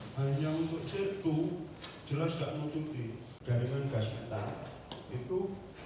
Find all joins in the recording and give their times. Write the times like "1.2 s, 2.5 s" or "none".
3.3 s